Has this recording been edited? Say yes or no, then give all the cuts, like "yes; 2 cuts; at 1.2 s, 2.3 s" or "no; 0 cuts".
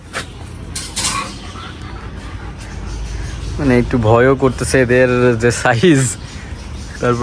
no; 0 cuts